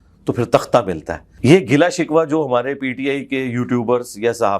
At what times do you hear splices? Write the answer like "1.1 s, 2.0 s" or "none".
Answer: 1.3 s